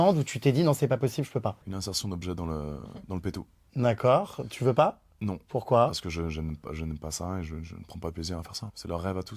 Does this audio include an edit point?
no; 0 cuts

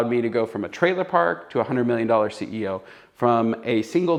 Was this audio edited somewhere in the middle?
no; 0 cuts

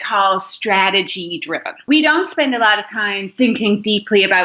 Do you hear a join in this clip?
yes; 2 cuts; at 1.8 s, 3.3 s

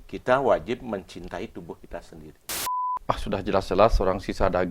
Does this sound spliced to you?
yes; 1 cut; at 2.5 s

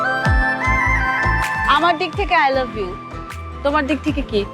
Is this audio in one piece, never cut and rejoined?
no; 1 cut; at 1.6 s

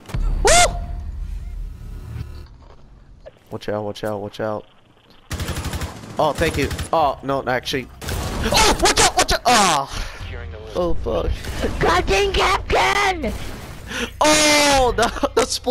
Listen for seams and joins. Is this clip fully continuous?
no; 2 cuts; at 3.2 s, 10.7 s

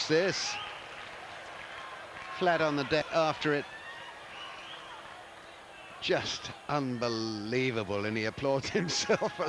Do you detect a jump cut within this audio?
yes; 1 cut; at 7.3 s

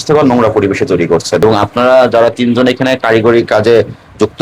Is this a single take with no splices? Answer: yes; 0 cuts

